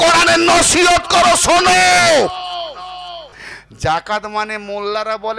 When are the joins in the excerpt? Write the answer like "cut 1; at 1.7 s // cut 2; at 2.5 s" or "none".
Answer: cut 1; at 3.4 s